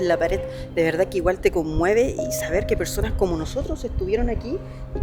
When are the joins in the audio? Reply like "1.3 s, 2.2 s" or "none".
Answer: none